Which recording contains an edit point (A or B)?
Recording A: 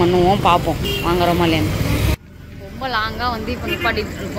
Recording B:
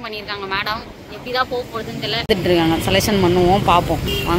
B